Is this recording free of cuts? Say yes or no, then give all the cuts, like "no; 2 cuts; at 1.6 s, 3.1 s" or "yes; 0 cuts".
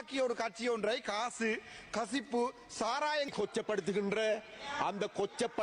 no; 1 cut; at 3.3 s